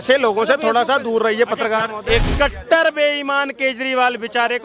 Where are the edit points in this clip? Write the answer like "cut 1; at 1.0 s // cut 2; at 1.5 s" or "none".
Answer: cut 1; at 2.3 s